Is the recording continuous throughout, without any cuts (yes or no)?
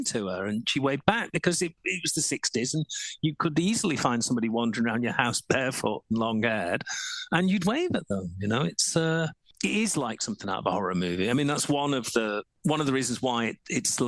no